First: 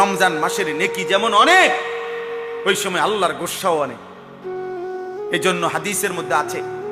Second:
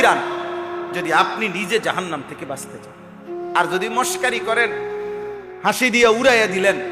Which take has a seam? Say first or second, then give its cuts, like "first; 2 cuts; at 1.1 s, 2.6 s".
first; 2 cuts; at 3.9 s, 5.4 s